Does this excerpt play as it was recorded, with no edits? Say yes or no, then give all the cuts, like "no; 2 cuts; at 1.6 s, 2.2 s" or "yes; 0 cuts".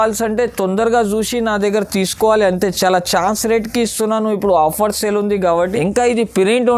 no; 1 cut; at 5.6 s